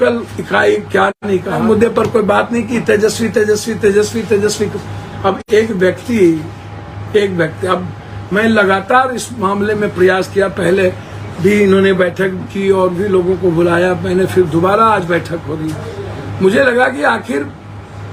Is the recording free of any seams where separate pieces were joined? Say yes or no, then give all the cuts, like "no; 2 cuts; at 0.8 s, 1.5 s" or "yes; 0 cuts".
no; 1 cut; at 1.6 s